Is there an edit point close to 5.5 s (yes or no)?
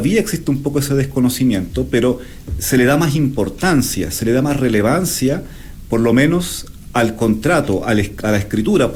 no